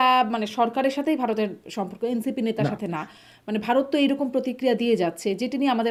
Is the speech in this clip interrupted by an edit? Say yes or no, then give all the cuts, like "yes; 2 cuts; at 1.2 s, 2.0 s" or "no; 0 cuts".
no; 0 cuts